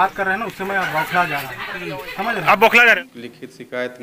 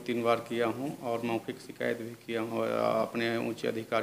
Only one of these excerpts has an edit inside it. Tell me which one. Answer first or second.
first